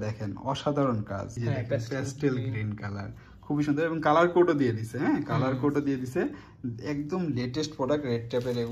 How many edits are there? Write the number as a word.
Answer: one